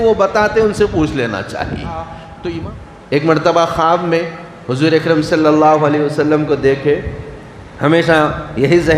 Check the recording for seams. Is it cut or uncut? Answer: cut